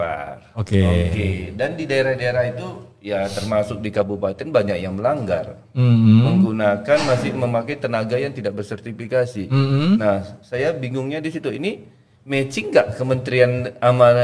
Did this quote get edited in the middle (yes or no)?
no